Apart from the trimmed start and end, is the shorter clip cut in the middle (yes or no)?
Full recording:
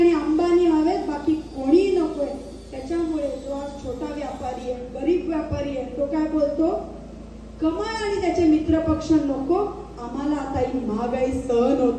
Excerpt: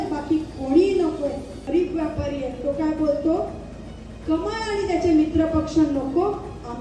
yes